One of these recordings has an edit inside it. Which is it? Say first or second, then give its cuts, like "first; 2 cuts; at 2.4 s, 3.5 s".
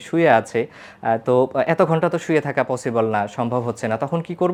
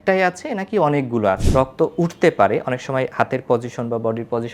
second; 1 cut; at 1.4 s